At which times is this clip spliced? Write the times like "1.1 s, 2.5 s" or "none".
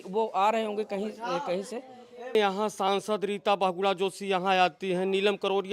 2.4 s